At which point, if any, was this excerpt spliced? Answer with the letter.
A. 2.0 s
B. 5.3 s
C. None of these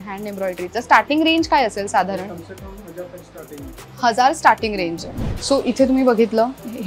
B